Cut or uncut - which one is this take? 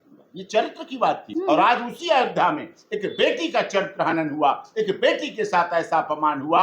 cut